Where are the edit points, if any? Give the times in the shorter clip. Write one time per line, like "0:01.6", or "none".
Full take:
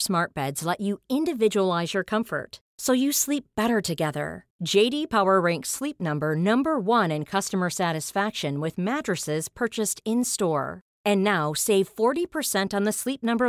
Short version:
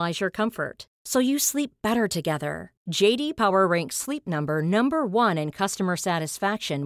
none